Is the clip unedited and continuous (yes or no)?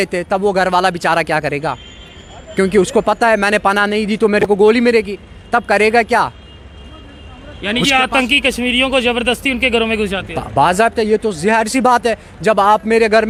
yes